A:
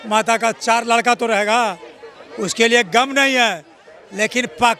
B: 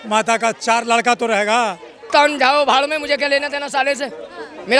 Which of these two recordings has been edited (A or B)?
B